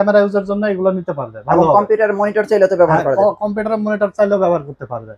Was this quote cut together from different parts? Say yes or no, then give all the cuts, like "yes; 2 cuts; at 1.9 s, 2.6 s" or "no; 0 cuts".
no; 0 cuts